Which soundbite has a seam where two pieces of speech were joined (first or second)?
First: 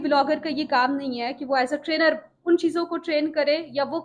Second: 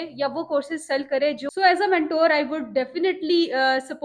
second